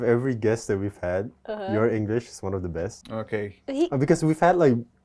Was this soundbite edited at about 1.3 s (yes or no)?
no